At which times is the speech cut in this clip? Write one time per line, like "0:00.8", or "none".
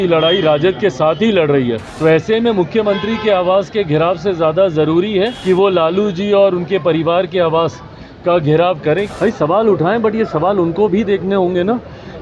0:01.9
0:05.4
0:09.1